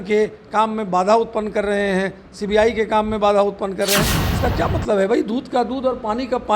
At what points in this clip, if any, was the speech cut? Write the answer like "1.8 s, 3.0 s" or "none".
4.2 s